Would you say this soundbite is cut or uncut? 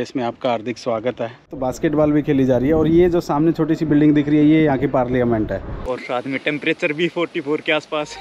cut